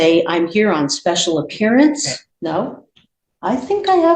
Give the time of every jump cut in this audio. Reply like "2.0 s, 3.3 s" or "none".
2.2 s